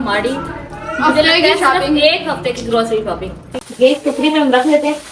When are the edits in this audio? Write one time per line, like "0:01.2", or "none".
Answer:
0:03.6